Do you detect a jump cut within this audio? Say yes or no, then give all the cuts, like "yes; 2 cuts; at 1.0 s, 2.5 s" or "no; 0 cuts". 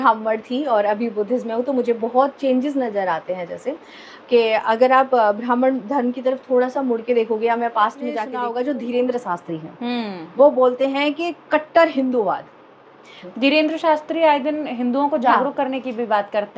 yes; 2 cuts; at 8.3 s, 13.2 s